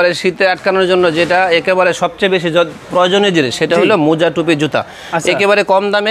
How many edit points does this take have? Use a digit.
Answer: 0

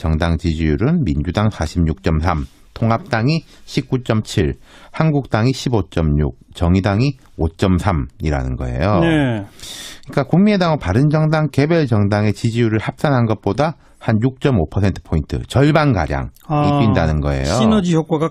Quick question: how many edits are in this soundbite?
0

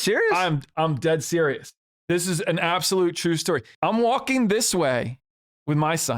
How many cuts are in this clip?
1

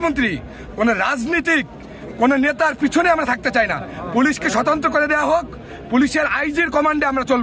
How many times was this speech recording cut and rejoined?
0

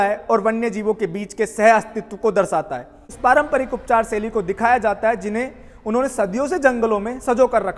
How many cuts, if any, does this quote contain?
1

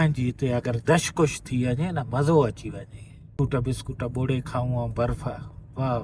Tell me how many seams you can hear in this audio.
1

